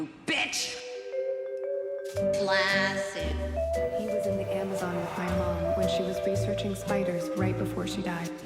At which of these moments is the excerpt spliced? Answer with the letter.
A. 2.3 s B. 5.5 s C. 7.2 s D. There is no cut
D